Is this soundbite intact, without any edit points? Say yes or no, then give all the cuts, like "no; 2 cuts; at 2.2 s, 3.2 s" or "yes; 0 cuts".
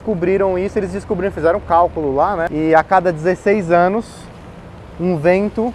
no; 1 cut; at 2.5 s